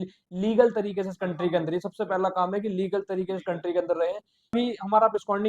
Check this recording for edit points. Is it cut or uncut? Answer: cut